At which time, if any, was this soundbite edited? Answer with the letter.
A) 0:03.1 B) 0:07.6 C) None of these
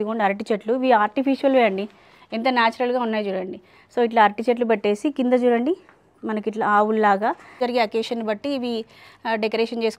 B